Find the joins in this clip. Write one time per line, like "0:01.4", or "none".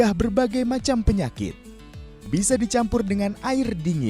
0:01.9